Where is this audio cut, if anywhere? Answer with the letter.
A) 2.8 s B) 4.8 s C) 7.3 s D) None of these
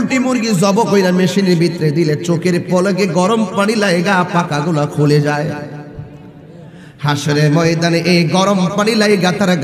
D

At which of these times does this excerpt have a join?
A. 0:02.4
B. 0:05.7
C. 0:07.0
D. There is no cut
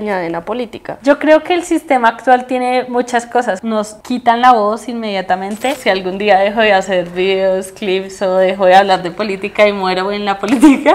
B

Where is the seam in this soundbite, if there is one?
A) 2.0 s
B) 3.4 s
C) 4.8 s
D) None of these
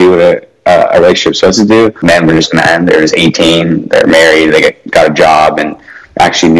A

